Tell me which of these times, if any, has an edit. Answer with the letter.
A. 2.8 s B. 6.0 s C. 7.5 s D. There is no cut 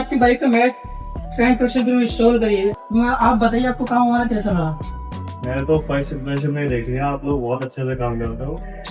A